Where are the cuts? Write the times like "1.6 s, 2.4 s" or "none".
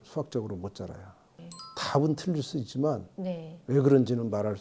1.4 s